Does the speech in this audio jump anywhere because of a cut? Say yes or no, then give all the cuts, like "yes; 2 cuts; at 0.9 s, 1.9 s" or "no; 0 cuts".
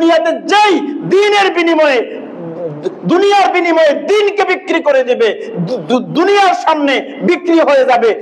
no; 0 cuts